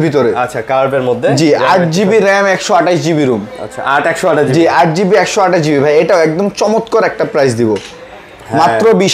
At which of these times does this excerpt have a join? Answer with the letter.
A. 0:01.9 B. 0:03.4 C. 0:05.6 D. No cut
D